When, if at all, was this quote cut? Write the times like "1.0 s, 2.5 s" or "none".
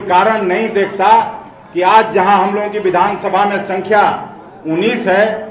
none